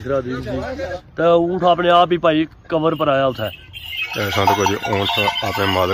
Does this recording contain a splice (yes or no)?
no